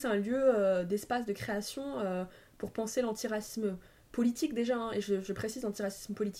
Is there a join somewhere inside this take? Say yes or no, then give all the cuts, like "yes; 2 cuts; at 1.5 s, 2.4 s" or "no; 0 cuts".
no; 0 cuts